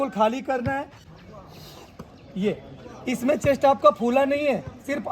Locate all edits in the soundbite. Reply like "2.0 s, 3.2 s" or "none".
1.0 s